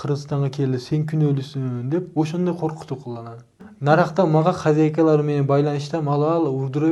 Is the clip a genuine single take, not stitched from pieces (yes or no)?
yes